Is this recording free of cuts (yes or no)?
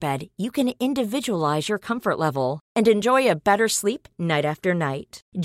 yes